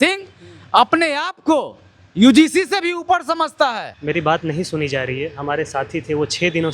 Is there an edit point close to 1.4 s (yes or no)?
no